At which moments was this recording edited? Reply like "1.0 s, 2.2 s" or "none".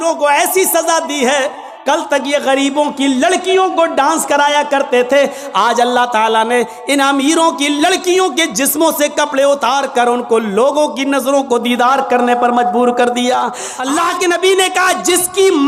1.7 s, 13.7 s